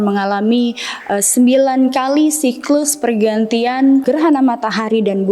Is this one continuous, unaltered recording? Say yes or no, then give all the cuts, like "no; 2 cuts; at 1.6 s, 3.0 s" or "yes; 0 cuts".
no; 1 cut; at 4.0 s